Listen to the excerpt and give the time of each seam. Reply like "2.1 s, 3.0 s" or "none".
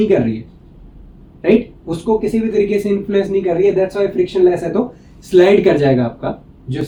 none